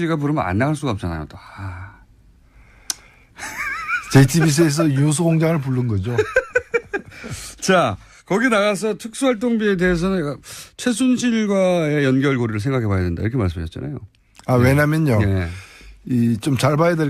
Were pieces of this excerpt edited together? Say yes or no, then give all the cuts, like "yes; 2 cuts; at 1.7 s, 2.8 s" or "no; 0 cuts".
no; 0 cuts